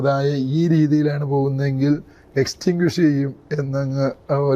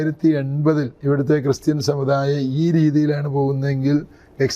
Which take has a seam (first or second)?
second